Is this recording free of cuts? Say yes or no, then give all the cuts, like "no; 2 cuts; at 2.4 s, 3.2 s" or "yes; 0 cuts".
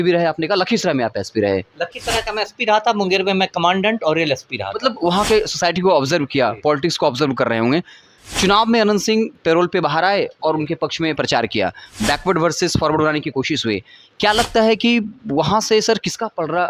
yes; 0 cuts